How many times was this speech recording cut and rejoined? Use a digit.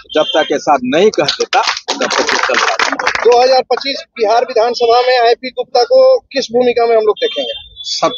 1